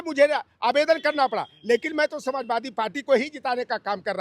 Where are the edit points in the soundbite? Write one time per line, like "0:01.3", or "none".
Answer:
none

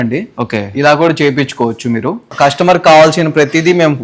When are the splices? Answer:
0:02.2

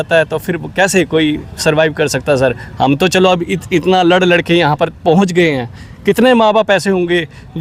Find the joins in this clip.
none

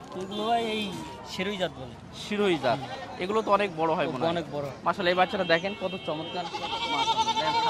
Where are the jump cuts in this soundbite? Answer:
none

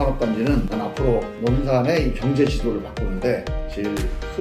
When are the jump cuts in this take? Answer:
0:01.0

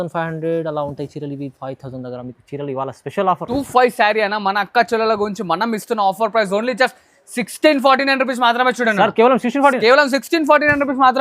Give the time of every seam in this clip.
0:03.5

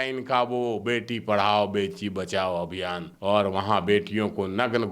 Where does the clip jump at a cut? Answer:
0:03.1

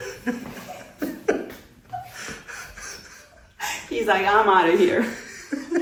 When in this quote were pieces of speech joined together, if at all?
none

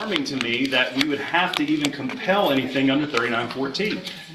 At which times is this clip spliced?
none

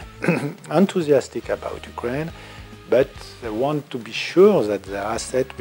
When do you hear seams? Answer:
none

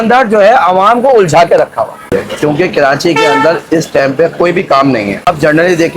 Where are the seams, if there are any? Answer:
0:02.1
0:05.3

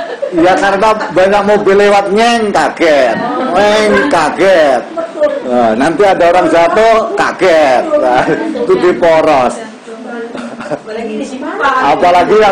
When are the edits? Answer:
none

